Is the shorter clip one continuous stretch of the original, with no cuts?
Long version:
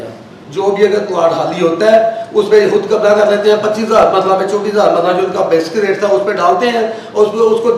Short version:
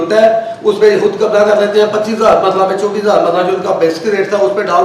yes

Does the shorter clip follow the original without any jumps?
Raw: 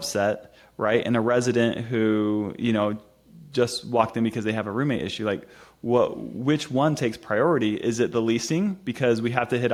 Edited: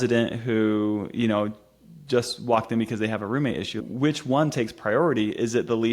no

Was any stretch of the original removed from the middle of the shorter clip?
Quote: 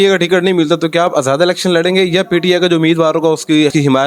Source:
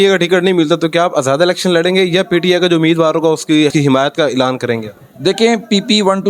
no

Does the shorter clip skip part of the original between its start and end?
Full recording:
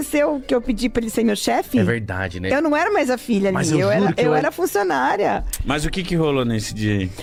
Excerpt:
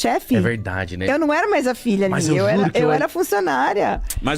no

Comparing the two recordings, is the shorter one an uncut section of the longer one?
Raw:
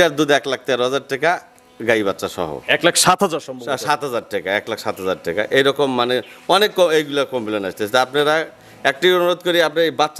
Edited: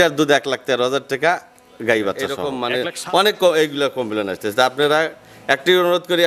no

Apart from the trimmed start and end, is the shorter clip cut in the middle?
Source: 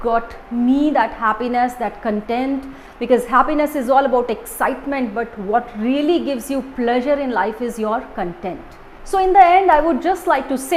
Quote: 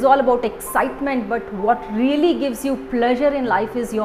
no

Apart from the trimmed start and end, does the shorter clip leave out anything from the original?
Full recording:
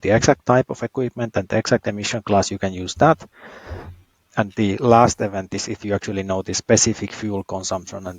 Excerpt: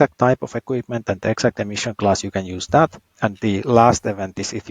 yes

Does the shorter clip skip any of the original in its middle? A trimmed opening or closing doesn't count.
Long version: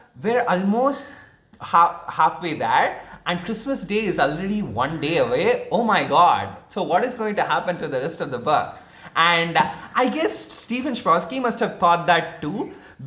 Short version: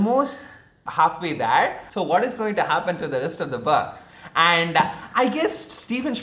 yes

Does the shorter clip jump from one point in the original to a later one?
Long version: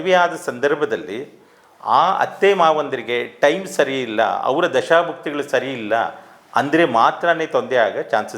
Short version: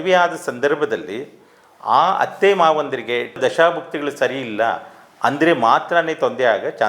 yes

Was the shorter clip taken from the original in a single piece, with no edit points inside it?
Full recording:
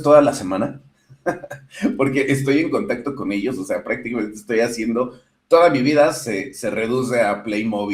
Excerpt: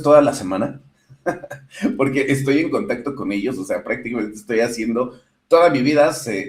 yes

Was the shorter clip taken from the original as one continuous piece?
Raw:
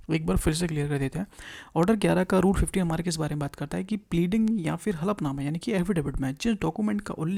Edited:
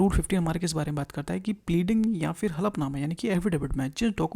yes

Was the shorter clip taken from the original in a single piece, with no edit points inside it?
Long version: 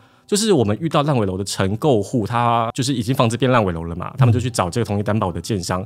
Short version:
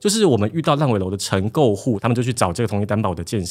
no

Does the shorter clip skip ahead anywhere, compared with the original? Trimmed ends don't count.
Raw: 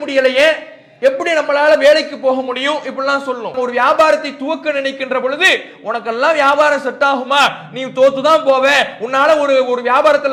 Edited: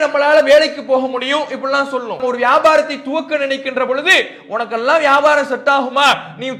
no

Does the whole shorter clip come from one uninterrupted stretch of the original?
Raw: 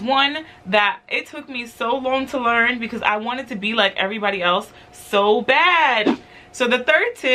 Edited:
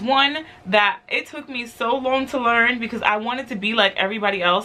yes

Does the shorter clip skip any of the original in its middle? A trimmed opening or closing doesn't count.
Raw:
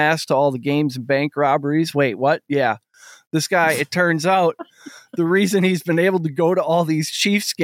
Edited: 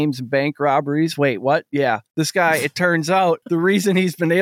yes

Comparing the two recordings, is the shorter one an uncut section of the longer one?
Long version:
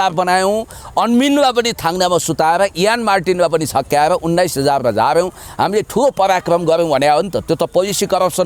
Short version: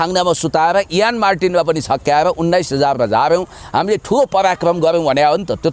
yes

